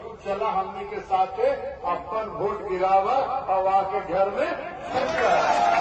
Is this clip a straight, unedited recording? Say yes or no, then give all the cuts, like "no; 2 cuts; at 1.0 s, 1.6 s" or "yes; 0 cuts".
yes; 0 cuts